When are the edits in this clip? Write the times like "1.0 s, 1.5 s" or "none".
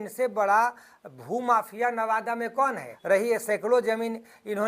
2.9 s